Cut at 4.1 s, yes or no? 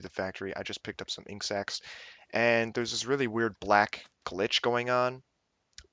no